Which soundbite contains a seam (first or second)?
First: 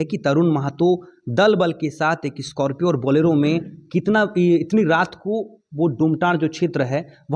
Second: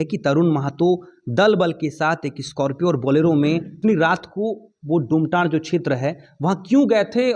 second